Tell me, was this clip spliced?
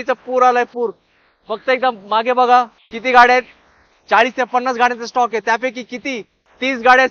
no; 0 cuts

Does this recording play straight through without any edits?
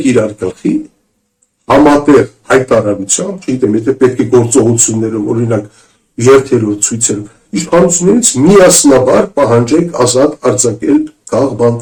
yes; 0 cuts

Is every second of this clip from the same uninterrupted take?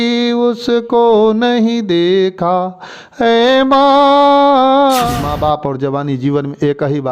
no; 1 cut; at 5.1 s

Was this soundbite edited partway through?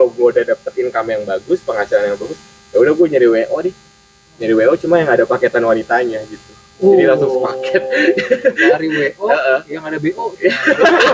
no; 0 cuts

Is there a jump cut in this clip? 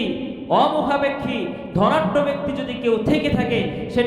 no; 0 cuts

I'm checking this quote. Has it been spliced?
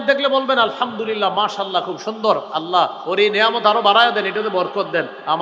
no; 0 cuts

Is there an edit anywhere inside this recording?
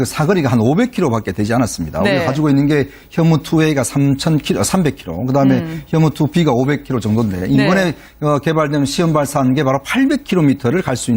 yes; 1 cut; at 6.8 s

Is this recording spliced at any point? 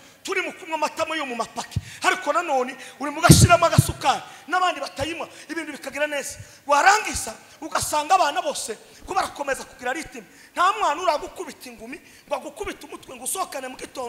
no; 0 cuts

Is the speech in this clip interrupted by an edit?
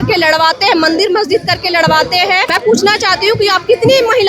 yes; 1 cut; at 2.5 s

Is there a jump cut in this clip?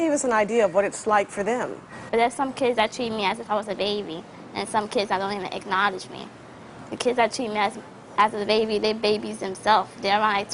no; 0 cuts

